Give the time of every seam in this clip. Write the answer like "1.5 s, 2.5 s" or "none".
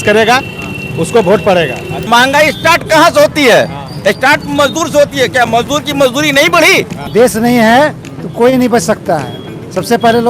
1.9 s, 7.0 s

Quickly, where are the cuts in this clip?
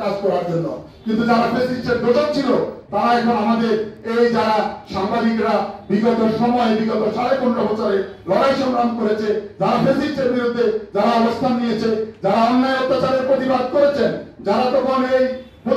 none

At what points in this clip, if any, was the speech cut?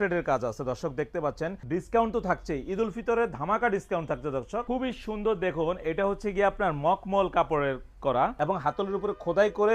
1.6 s, 4.6 s, 8.4 s

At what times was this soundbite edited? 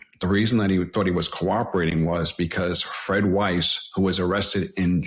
none

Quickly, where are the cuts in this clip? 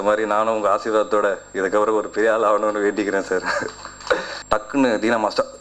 4.3 s

